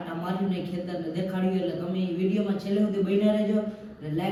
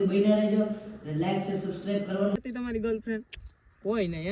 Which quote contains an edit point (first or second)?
second